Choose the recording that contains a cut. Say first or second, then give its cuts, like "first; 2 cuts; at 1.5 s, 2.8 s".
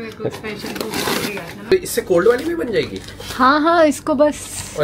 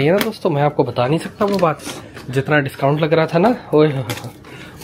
first; 1 cut; at 1.7 s